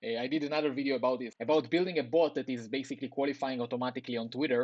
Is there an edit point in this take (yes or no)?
yes